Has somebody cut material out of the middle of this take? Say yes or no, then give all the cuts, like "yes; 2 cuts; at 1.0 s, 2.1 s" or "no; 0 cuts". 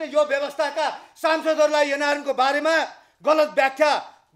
no; 0 cuts